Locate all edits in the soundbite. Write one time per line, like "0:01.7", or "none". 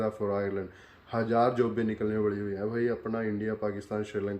none

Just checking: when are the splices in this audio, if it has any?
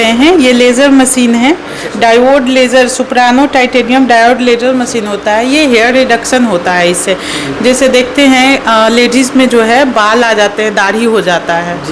none

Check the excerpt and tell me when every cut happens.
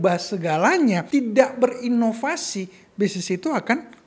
0:01.0

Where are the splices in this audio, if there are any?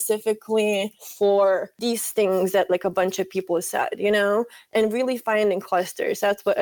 0:01.0
0:01.7
0:04.7

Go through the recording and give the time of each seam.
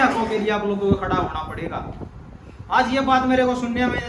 none

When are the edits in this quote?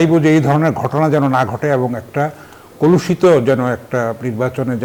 none

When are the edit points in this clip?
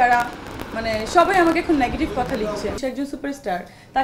0:02.8

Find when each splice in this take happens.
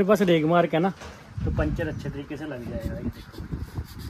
none

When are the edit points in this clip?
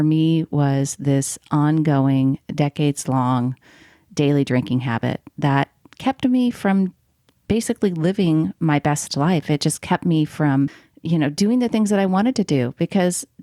0:10.9

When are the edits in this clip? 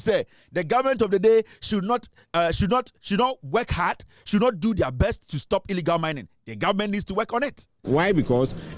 0:07.8

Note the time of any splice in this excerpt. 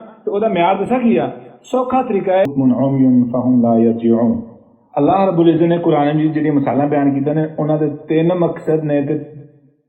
0:02.5

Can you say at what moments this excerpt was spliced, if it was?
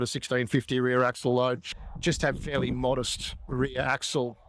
0:01.9

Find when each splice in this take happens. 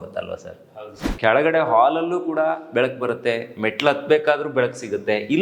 0:01.0

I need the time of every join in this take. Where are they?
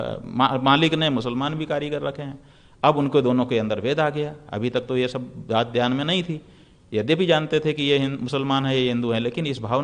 none

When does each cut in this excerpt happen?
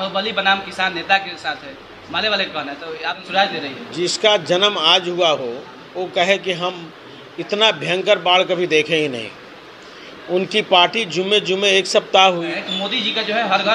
0:03.2
0:12.5

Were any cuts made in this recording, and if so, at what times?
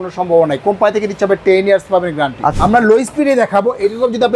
0:02.5

